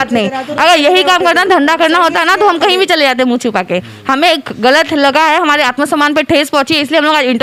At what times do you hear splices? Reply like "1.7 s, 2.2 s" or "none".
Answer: none